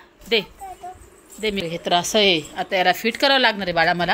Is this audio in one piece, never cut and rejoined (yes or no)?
yes